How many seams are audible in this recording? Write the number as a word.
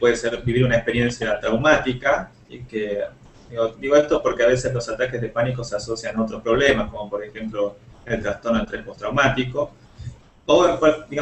one